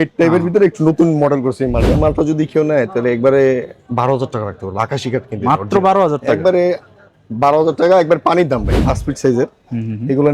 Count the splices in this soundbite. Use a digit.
2